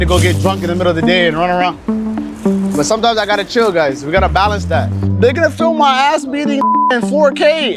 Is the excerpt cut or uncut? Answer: uncut